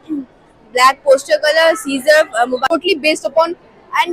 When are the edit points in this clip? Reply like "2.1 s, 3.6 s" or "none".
2.6 s